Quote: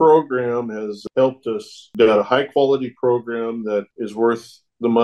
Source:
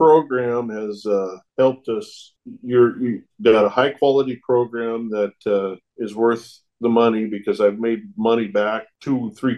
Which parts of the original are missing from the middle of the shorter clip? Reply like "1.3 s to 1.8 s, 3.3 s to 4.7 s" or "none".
1.0 s to 1.4 s, 2.2 s to 3.3 s, 5.4 s to 5.9 s